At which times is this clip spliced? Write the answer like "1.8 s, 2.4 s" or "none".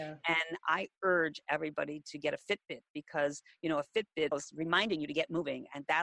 4.3 s